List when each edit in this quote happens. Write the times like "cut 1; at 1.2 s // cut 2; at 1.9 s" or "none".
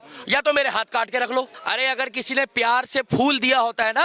cut 1; at 1.6 s